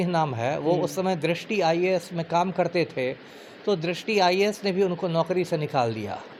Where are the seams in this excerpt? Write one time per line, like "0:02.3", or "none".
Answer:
none

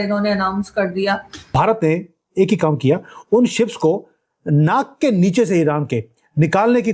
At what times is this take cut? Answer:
0:01.5

